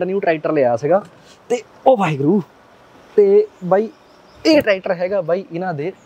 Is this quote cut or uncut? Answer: uncut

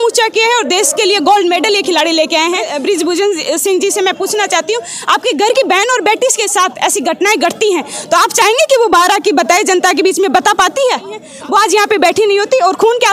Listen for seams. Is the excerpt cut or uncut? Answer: cut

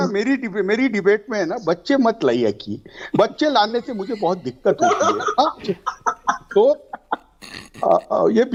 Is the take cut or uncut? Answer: uncut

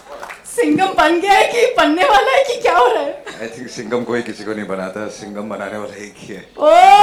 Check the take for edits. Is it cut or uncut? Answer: uncut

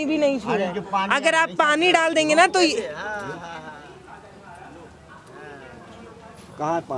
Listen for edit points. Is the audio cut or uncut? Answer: uncut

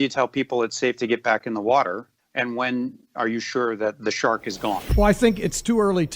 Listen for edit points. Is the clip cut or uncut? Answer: cut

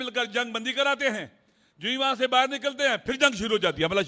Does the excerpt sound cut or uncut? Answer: uncut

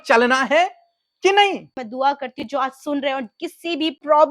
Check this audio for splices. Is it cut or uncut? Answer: cut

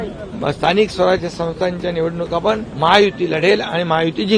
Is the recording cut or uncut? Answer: cut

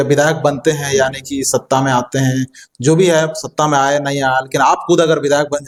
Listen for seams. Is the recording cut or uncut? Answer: uncut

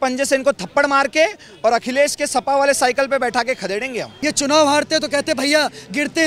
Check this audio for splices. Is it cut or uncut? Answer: cut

